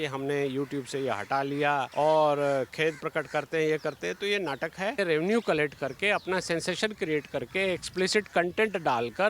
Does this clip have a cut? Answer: yes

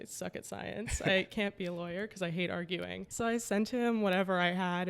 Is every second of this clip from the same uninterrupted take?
no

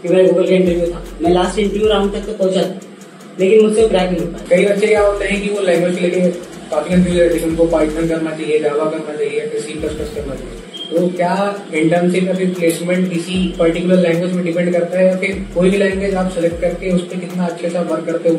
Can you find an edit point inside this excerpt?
yes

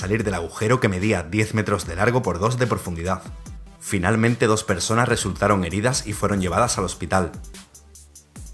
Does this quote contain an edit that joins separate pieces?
yes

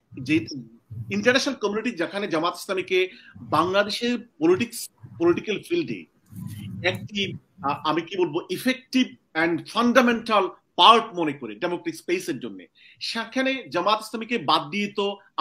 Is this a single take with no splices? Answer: yes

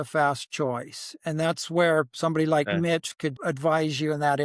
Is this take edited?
yes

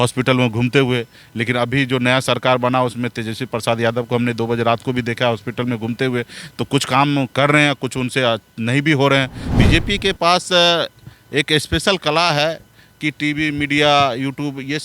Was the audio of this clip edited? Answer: yes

